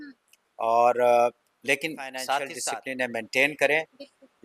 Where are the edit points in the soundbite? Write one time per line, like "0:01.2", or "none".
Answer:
0:02.6